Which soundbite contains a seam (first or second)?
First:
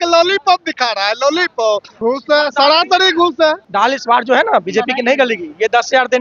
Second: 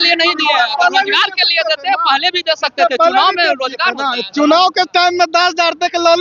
first